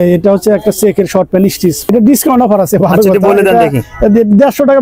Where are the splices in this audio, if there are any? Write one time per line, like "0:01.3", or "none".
0:01.9